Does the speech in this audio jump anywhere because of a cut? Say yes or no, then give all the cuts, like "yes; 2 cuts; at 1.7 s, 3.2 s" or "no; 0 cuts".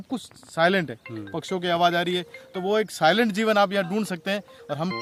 no; 0 cuts